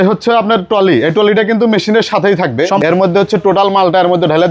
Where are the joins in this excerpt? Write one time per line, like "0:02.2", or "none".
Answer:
0:02.9